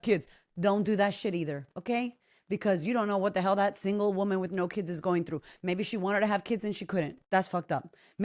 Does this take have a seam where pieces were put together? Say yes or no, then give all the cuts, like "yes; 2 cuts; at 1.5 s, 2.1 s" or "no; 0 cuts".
yes; 1 cut; at 7.2 s